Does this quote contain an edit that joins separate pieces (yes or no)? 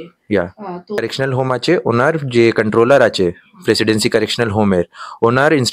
yes